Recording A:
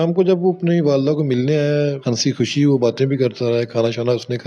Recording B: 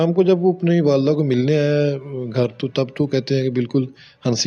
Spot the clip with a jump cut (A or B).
A